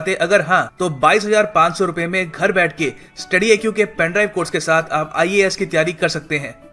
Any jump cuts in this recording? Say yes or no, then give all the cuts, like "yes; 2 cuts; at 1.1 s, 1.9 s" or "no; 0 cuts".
no; 0 cuts